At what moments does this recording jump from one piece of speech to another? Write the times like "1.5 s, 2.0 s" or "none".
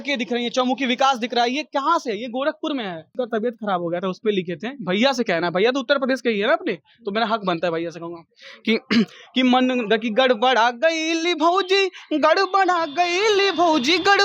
3.1 s